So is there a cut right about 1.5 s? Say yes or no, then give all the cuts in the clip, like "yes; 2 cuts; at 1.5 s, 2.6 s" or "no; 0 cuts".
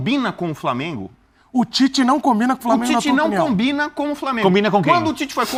no; 0 cuts